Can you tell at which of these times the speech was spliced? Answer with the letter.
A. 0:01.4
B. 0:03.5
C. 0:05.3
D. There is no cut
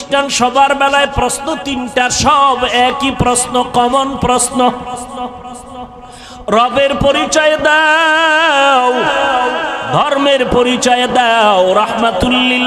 D